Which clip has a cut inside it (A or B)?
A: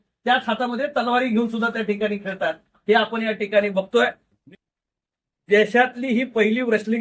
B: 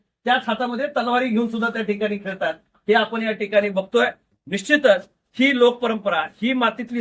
A